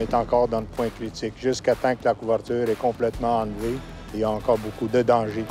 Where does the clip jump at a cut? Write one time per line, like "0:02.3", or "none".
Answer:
0:04.2